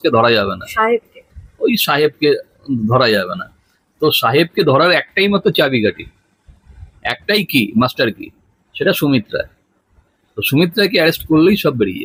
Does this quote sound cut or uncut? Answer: uncut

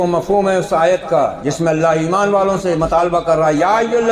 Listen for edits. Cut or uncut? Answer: uncut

